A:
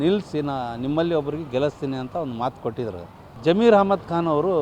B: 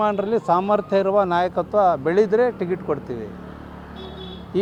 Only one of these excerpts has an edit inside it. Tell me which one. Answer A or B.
A